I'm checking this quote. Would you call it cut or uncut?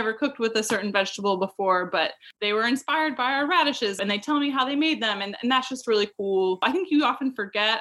cut